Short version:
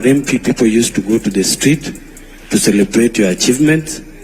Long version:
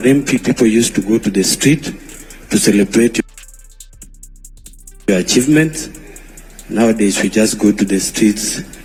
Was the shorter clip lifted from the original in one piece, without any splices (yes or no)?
no